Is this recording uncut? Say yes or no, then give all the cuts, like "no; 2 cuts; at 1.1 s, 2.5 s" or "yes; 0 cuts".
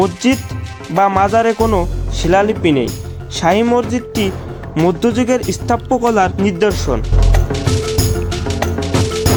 yes; 0 cuts